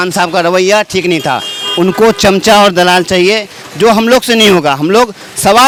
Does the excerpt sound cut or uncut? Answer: uncut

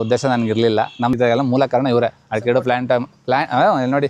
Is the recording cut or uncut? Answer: cut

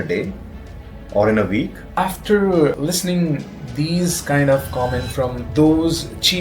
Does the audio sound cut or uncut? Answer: cut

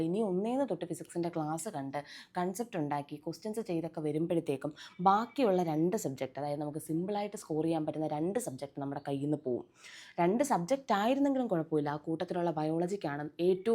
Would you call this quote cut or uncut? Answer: uncut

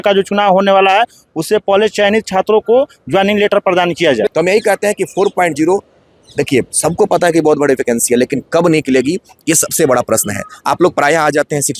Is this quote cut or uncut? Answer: cut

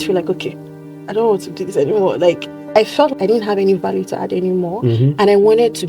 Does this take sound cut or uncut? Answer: cut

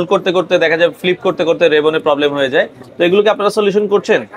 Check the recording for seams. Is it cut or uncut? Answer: uncut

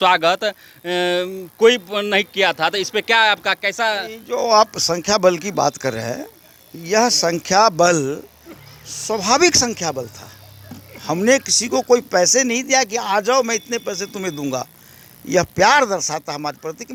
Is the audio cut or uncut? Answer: uncut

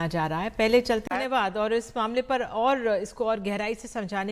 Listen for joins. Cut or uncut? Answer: cut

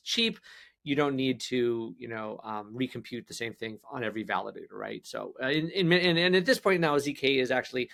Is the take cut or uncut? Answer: uncut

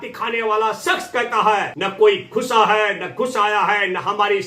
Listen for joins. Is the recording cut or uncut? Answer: cut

